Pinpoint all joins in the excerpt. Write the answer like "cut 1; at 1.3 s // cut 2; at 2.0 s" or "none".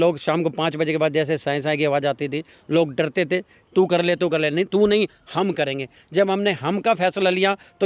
cut 1; at 3.6 s